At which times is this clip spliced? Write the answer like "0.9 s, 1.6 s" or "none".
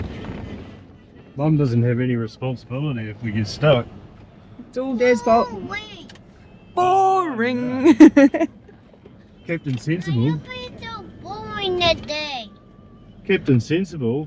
none